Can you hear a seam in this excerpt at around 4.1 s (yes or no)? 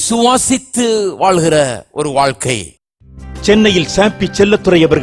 no